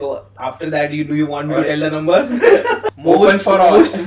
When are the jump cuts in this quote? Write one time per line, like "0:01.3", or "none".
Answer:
0:02.9